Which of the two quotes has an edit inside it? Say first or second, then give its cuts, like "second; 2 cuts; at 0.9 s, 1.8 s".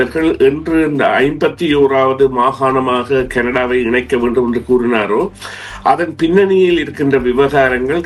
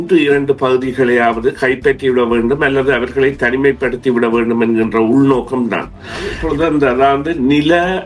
second; 1 cut; at 6.4 s